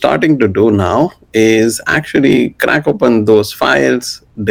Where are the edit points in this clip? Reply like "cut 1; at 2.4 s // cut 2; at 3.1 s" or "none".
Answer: none